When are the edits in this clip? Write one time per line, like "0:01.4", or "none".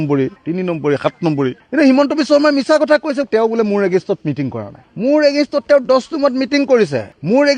0:01.6